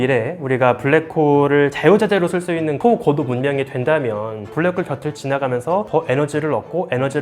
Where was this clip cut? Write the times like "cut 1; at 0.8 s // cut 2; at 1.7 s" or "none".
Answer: cut 1; at 2.8 s // cut 2; at 4.5 s